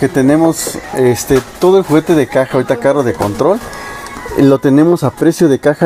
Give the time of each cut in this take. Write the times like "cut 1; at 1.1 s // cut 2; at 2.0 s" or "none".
none